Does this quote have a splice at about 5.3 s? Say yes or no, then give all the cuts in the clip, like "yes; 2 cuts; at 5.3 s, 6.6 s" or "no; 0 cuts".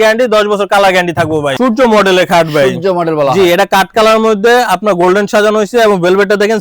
no; 1 cut; at 1.5 s